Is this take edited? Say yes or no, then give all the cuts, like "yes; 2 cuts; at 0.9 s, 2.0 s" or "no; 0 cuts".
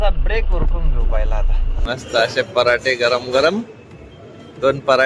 no; 0 cuts